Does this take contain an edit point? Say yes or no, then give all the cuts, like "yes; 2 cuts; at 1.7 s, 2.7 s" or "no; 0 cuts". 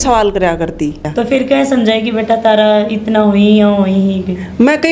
yes; 1 cut; at 1.0 s